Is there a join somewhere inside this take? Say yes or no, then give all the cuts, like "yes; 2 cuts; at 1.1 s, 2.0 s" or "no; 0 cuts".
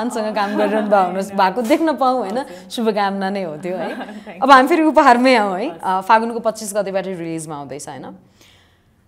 no; 0 cuts